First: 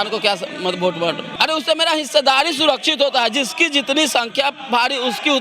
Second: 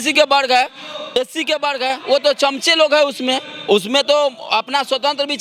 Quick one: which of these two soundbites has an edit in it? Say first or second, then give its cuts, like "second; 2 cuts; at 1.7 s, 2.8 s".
first; 1 cut; at 1.3 s